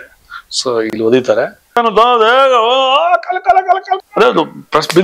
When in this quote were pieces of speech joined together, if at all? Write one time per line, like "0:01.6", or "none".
0:01.8
0:04.1